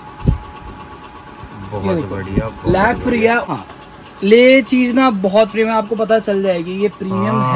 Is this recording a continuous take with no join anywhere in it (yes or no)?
no